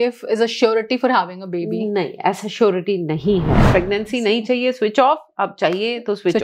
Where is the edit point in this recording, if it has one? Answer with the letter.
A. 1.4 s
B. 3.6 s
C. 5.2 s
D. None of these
B